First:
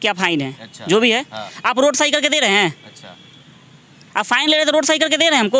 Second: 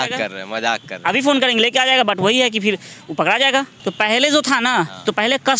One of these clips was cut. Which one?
second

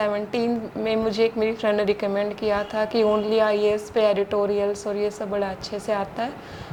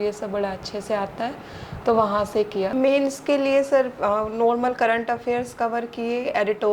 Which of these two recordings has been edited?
second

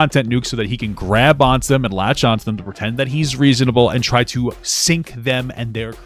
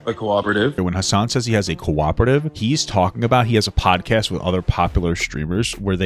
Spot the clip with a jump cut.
second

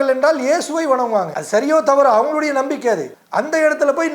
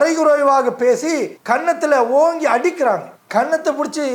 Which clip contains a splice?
first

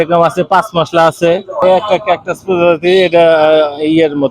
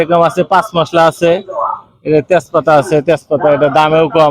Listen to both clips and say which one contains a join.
first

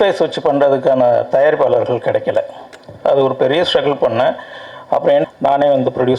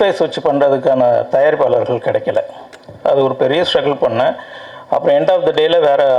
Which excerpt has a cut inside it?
first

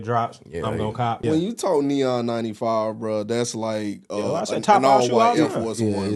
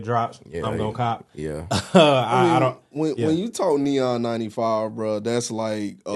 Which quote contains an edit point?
first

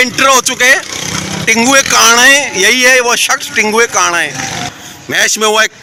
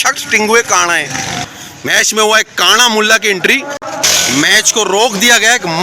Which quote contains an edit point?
second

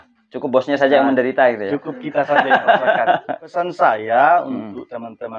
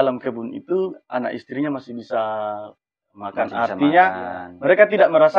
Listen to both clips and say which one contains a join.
first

